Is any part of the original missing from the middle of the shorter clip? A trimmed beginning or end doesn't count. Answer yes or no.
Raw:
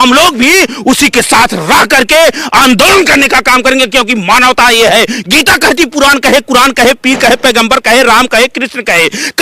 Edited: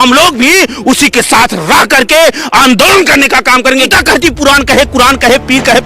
yes